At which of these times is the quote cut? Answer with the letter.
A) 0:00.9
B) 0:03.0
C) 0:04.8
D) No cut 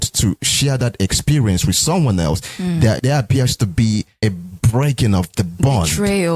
B